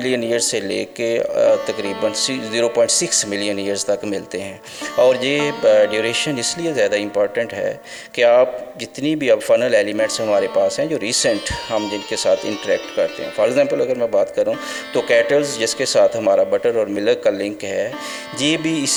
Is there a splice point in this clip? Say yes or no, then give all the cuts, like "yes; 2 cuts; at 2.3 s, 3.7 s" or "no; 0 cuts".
no; 0 cuts